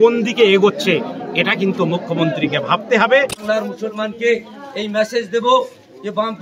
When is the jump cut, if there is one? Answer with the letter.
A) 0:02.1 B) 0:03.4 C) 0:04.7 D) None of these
B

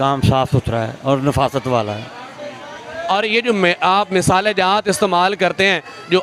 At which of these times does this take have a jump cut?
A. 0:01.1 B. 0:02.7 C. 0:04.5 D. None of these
D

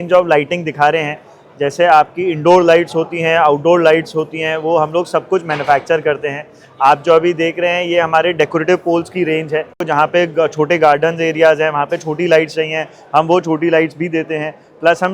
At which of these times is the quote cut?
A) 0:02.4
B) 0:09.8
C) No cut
B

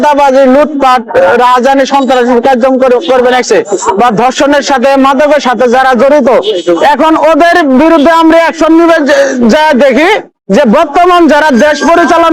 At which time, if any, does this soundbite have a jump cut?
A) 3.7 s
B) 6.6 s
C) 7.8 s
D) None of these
D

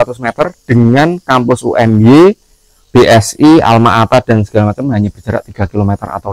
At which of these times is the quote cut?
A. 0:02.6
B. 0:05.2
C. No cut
C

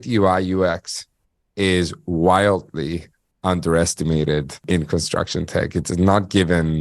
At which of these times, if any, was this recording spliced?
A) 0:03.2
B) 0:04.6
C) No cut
B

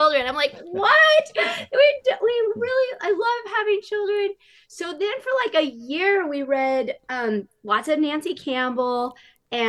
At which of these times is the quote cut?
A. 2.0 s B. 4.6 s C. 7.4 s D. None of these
D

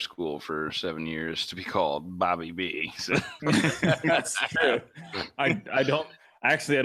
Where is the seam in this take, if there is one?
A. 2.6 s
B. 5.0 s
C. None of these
C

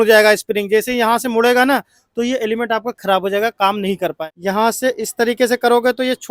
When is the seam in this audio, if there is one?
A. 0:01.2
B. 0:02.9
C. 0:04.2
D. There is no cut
C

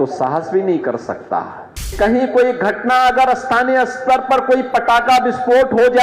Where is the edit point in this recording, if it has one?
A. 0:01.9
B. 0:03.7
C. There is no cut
A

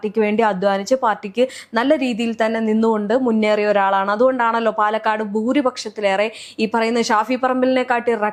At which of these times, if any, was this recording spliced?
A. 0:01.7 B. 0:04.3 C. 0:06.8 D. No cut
D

